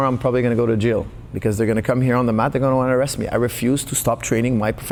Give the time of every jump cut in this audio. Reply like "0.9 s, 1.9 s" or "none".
none